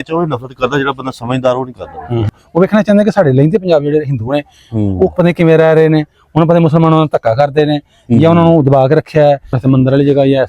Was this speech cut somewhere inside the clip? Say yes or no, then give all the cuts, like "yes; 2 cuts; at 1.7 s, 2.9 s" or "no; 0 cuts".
yes; 2 cuts; at 2.3 s, 9.6 s